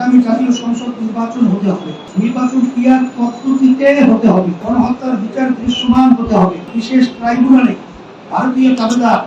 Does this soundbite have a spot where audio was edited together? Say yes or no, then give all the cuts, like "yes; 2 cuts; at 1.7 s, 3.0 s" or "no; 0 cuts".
yes; 3 cuts; at 2.1 s, 4.6 s, 6.7 s